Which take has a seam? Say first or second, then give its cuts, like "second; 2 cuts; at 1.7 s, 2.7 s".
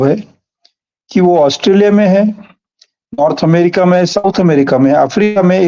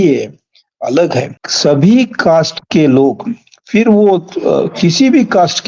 second; 1 cut; at 1.4 s